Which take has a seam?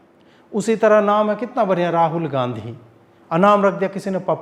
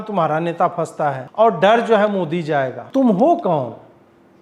second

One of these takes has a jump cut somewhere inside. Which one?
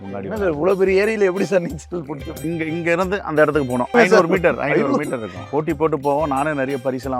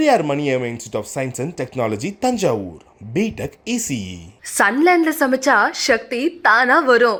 first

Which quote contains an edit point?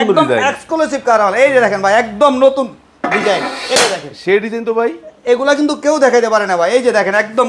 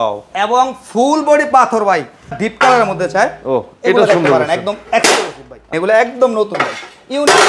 second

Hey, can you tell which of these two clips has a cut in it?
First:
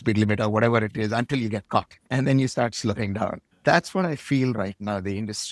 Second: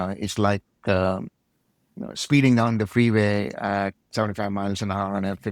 first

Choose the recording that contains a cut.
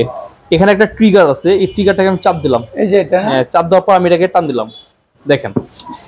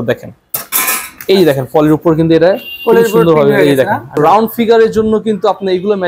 second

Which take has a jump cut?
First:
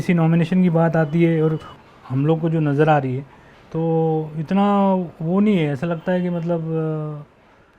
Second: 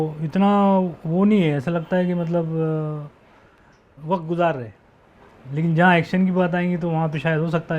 first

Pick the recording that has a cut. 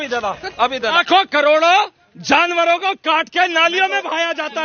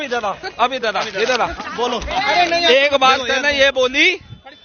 first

